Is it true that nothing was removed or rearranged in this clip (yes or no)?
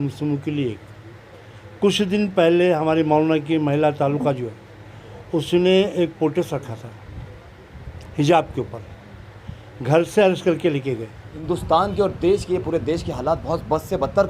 no